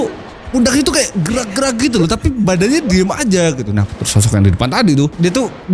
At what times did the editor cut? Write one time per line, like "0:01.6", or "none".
0:03.9